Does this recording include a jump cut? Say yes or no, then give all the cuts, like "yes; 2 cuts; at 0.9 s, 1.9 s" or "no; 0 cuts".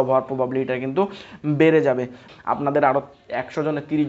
yes; 1 cut; at 2.3 s